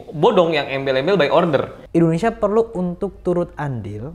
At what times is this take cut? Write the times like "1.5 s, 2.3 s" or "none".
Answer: 1.8 s